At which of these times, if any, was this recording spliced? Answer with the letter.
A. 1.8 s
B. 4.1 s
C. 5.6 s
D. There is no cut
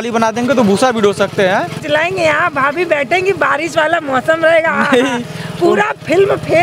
A